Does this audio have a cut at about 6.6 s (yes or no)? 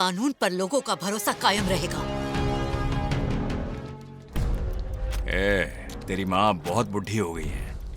no